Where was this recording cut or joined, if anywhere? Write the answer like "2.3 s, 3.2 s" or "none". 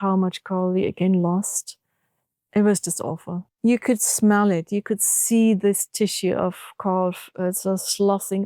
3.4 s